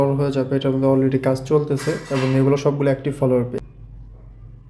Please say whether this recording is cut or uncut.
cut